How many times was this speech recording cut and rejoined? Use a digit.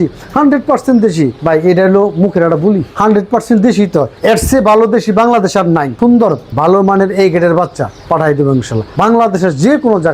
2